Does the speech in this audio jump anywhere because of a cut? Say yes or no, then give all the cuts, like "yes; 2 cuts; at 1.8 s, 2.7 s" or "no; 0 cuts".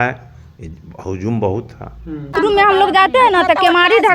yes; 1 cut; at 2.3 s